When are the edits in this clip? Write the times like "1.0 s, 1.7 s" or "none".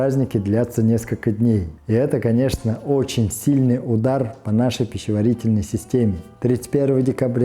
1.7 s, 6.3 s